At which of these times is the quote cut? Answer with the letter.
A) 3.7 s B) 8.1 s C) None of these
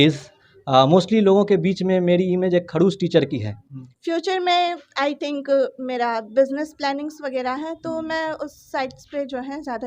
A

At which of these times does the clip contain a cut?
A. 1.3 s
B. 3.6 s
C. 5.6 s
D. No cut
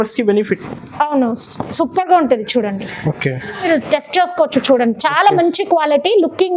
B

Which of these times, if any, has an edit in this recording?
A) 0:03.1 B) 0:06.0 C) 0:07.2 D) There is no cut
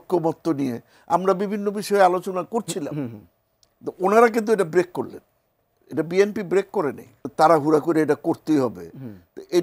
C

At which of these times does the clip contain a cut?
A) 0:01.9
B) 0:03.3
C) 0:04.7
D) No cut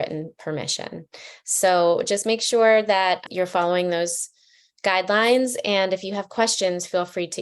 B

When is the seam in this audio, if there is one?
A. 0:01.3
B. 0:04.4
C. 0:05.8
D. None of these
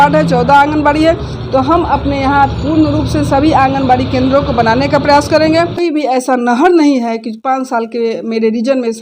C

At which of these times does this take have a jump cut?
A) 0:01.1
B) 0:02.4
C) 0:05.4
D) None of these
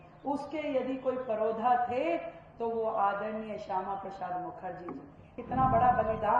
C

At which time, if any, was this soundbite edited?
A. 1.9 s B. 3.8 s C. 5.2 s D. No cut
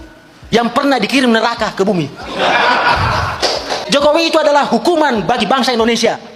B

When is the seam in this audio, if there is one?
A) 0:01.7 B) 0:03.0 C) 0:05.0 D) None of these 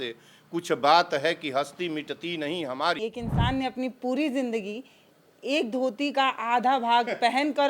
B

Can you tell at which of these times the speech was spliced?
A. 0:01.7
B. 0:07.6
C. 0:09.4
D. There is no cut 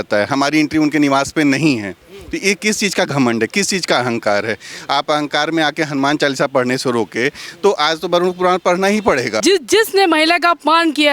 C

